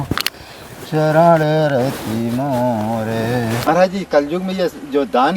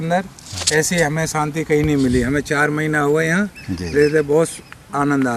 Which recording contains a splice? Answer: first; 1 cut; at 3.6 s

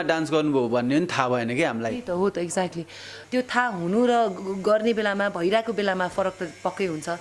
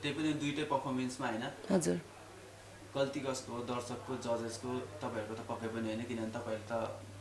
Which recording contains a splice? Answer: first; 1 cut; at 3.1 s

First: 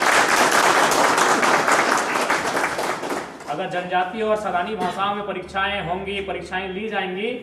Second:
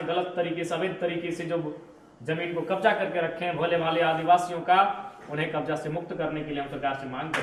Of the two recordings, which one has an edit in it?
first; 1 cut; at 2.3 s

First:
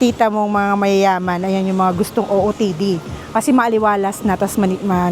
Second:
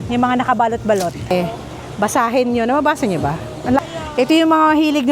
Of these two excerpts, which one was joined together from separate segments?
second; 2 cuts; at 1.3 s, 3.8 s

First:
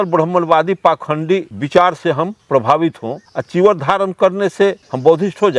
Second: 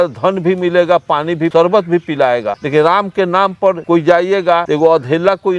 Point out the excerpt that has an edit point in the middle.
second; 4 cuts; at 1.5 s, 2.6 s, 3.8 s, 4.6 s

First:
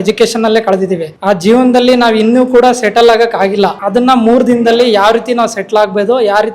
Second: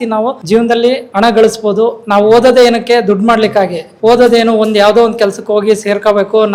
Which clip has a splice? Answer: first; 2 cuts; at 1.1 s, 3.8 s

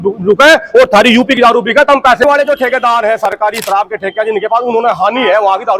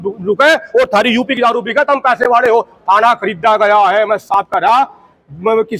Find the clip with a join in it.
first; 1 cut; at 2.2 s

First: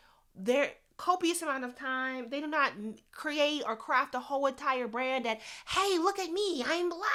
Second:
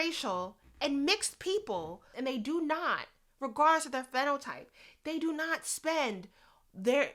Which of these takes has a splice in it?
second; 1 cut; at 2.1 s

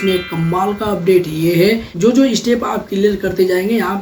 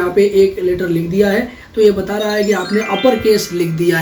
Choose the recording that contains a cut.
first; 1 cut; at 1.9 s

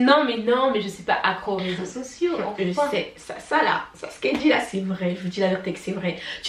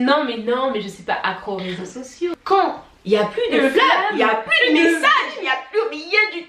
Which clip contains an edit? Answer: second; 1 cut; at 2.4 s

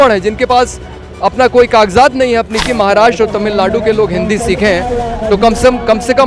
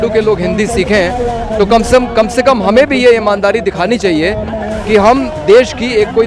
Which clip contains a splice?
first; 1 cut; at 2.6 s

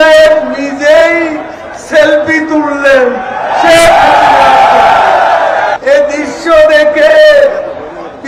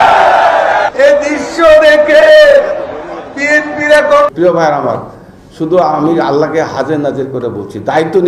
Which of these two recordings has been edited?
second; 1 cut; at 4.3 s

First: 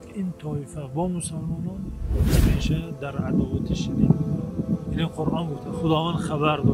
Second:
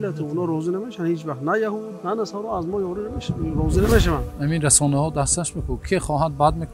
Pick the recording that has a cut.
second; 1 cut; at 4.3 s

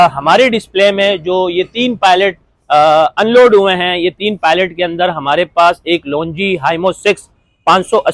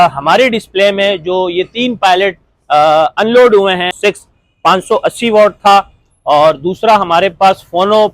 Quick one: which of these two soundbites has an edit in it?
second; 1 cut; at 3.9 s

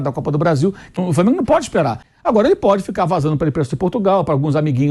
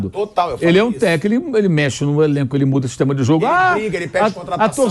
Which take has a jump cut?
first; 2 cuts; at 1.0 s, 2.0 s

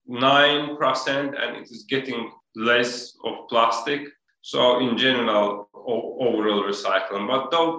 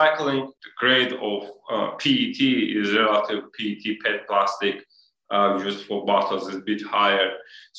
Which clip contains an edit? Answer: first; 1 cut; at 2.4 s

